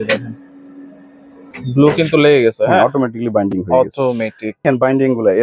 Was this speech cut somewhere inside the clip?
yes; 2 cuts; at 1.5 s, 4.6 s

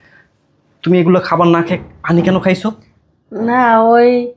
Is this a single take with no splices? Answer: yes; 0 cuts

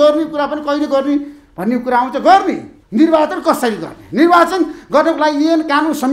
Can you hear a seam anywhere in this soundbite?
yes; 1 cut; at 2.7 s

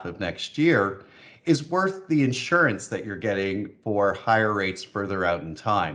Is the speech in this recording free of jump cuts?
yes; 0 cuts

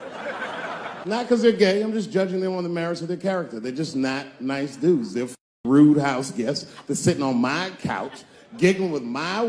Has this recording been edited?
yes; 1 cut; at 1.1 s

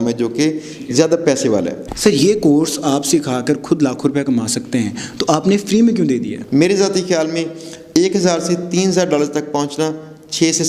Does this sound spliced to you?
yes; 2 cuts; at 1.8 s, 6.4 s

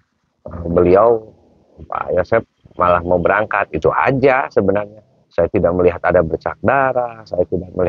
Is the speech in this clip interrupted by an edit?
no; 0 cuts

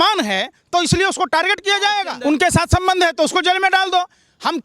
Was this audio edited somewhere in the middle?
yes; 1 cut; at 2.1 s

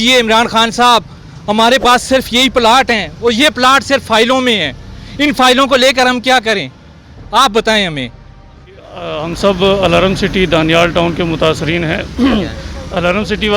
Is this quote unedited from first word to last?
no; 1 cut; at 9.2 s

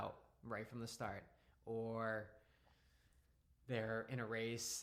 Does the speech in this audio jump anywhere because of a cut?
no; 0 cuts

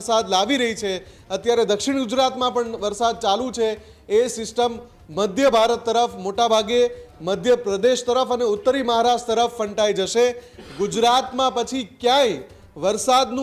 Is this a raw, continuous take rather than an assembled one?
yes; 0 cuts

